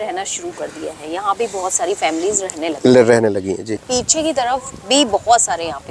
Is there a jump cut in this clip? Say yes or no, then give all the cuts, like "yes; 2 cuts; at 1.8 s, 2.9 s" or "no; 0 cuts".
yes; 1 cut; at 3.8 s